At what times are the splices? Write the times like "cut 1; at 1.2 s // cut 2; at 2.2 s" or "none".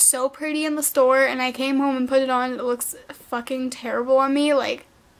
none